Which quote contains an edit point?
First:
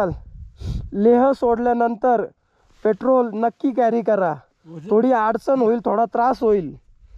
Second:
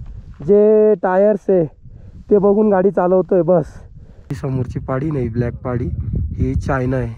second; 1 cut; at 4.4 s

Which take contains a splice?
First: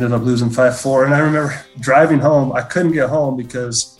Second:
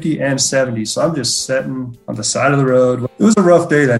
second; 2 cuts; at 2.0 s, 3.1 s

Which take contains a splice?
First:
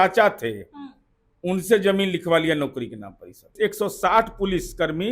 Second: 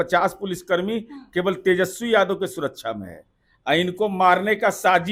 first; 1 cut; at 3.5 s

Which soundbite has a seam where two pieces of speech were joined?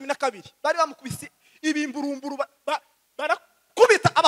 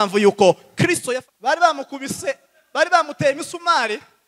second; 1 cut; at 1.0 s

